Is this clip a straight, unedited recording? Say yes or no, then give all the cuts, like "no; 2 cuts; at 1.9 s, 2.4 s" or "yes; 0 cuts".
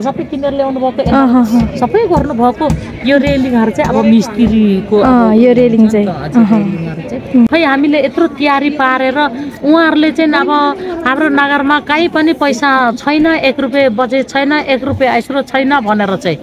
no; 1 cut; at 7.5 s